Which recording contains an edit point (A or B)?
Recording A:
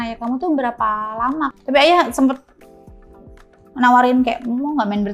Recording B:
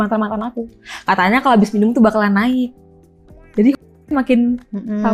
A